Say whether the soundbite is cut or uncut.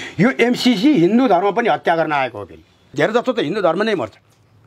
cut